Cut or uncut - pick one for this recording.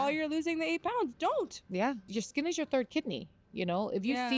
cut